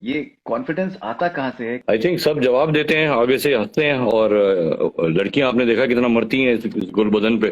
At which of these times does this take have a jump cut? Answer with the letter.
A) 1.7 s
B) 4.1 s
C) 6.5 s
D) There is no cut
A